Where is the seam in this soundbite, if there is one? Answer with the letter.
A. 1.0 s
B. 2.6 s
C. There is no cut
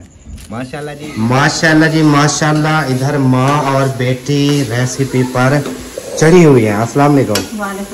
A